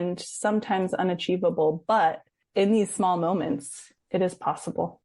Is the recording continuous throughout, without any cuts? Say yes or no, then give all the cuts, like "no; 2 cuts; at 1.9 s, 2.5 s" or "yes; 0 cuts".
yes; 0 cuts